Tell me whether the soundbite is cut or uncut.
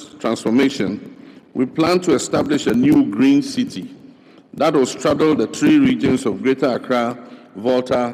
uncut